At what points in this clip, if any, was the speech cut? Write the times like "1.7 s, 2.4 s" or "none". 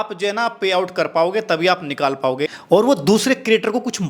2.6 s